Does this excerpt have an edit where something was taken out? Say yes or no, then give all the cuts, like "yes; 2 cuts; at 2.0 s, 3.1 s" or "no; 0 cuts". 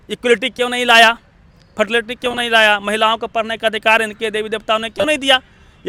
no; 0 cuts